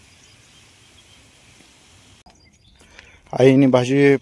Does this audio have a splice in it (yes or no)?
yes